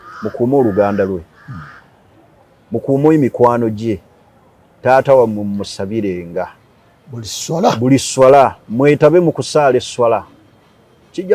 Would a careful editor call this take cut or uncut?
uncut